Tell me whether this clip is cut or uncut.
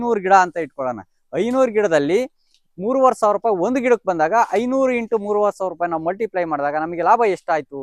uncut